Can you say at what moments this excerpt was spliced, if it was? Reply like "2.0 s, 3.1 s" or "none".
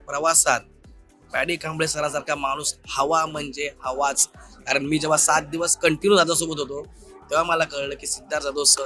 none